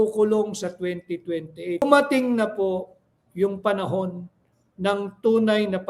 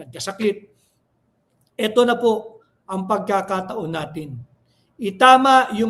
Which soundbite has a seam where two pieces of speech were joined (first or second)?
first